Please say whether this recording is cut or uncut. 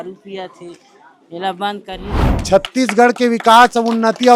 cut